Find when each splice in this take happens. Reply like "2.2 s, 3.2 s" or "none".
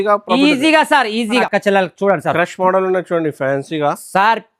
1.4 s